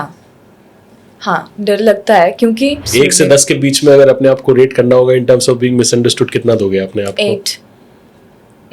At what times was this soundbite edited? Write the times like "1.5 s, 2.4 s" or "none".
2.9 s